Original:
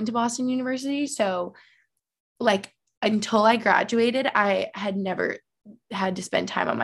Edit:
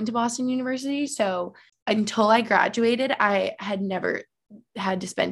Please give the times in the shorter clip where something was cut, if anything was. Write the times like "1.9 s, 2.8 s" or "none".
1.7 s